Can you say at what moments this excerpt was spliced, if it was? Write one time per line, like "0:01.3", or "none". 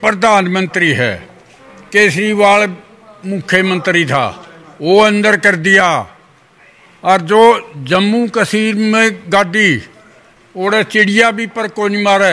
none